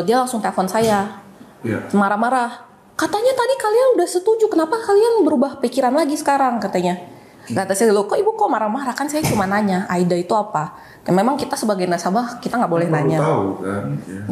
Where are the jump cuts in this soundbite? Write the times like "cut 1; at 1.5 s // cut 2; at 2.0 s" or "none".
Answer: none